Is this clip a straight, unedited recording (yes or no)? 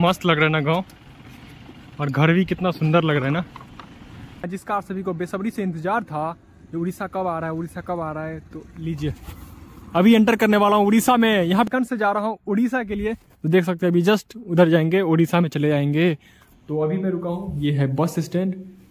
no